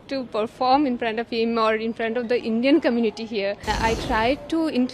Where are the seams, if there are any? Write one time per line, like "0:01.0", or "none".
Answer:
0:03.7

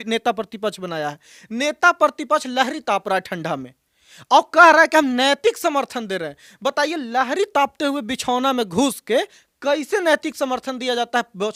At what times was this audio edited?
none

